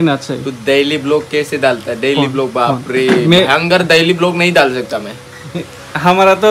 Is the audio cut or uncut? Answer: uncut